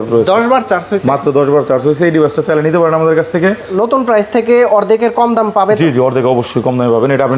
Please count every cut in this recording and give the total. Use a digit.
1